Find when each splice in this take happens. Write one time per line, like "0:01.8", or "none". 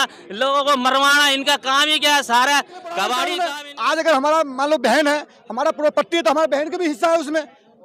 0:03.2